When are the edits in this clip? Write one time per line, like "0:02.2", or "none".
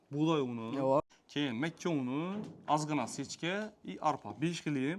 0:01.0